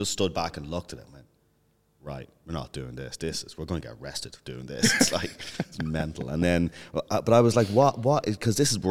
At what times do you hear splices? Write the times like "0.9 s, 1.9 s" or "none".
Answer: none